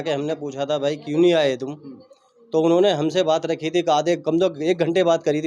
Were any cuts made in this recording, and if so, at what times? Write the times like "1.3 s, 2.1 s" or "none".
none